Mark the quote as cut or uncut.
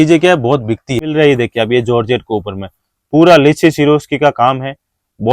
cut